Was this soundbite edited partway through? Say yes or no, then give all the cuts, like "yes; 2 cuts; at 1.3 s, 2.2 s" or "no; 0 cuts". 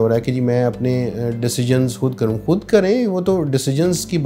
no; 0 cuts